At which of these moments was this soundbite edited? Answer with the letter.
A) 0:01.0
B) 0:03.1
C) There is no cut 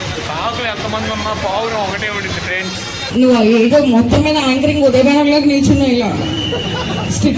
B